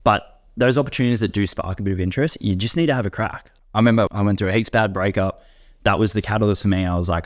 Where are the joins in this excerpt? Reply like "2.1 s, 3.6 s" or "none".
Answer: 3.4 s, 4.1 s